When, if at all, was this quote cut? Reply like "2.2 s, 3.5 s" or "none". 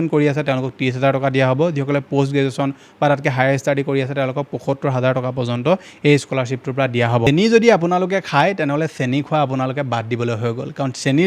7.3 s